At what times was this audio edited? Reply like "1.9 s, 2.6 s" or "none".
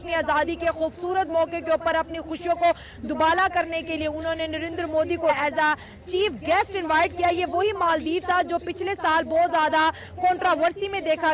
5.3 s